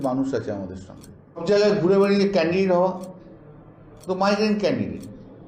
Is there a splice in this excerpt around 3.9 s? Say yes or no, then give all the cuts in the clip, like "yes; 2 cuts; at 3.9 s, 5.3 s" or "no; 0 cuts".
no; 1 cut; at 1.4 s